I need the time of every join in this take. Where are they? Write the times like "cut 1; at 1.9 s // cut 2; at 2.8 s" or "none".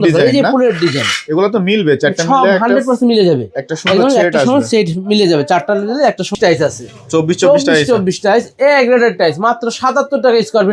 cut 1; at 6.4 s